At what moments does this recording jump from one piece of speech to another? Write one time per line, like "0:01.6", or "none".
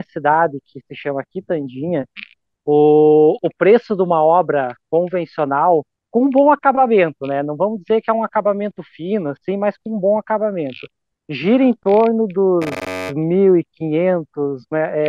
none